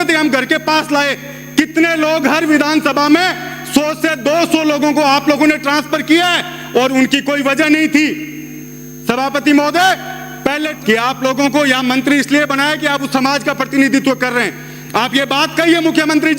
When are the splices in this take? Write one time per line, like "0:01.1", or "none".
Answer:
0:10.7